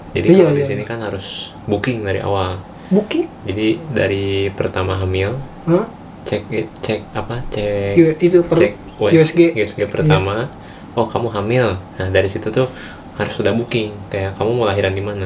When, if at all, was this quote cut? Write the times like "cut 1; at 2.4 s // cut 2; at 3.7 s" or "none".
none